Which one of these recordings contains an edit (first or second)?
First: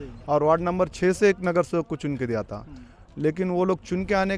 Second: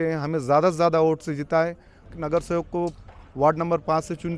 second